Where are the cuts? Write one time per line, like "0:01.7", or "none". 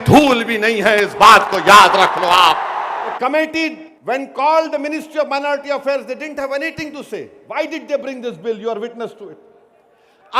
0:03.1
0:03.9